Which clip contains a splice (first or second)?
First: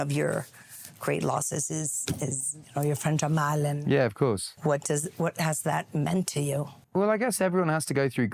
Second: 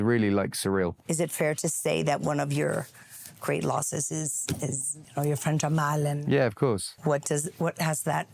second